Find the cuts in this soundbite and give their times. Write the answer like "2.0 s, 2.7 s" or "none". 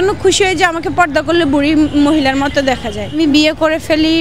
3.1 s